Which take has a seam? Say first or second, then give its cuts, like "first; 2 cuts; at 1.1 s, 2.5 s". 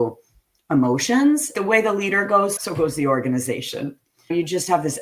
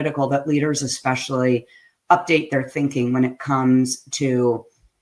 first; 3 cuts; at 1.5 s, 2.6 s, 4.3 s